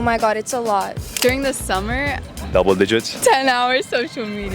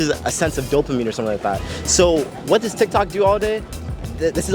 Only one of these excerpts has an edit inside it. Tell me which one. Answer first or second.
first